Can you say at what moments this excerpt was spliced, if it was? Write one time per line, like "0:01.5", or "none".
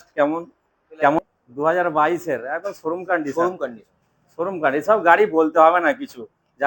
0:01.2